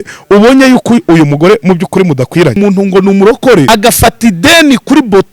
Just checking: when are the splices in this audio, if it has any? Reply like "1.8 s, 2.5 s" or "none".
2.6 s, 3.7 s